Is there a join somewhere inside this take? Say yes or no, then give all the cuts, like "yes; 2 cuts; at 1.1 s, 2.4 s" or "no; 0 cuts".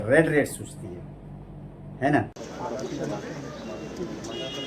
yes; 1 cut; at 2.4 s